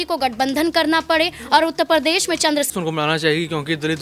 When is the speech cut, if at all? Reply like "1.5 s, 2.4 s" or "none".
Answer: 2.7 s